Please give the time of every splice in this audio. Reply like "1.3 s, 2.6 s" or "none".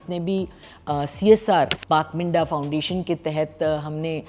1.8 s